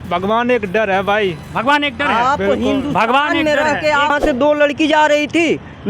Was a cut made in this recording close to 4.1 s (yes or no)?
yes